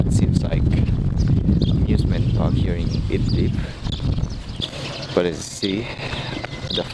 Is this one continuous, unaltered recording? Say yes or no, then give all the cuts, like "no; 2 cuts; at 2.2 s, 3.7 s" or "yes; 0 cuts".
yes; 0 cuts